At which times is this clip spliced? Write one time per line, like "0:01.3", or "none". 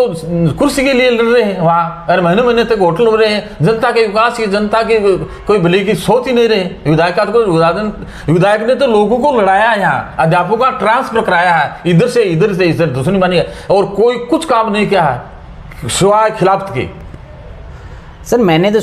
none